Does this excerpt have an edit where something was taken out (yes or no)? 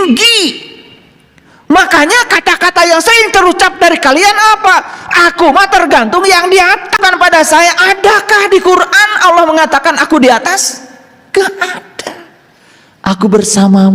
yes